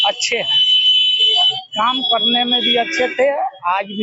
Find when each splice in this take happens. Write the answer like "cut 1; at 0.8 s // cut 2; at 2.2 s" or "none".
none